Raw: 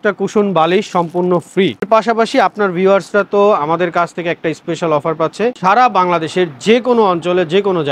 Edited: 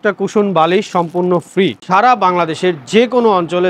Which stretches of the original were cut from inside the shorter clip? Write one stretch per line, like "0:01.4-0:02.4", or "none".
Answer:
0:01.8-0:05.6